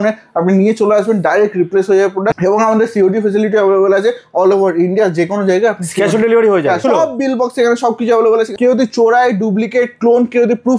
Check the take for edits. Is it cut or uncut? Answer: cut